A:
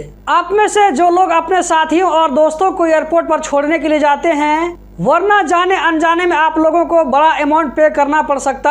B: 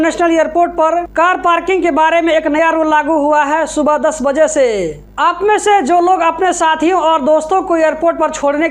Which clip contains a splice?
A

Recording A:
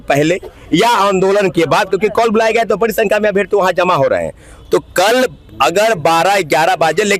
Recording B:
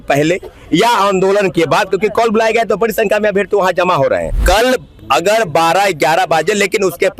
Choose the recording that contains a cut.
B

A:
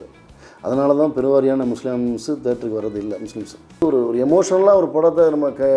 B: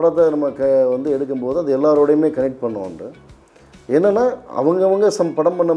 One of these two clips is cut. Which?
A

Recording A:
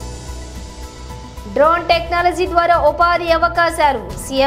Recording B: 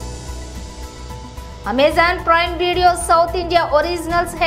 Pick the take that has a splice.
A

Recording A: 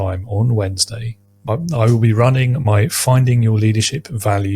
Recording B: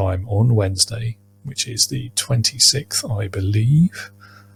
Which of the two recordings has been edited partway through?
A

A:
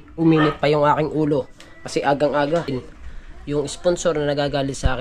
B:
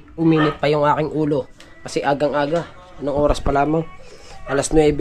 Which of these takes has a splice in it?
A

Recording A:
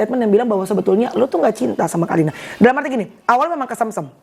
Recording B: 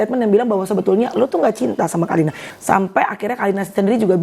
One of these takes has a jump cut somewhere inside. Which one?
B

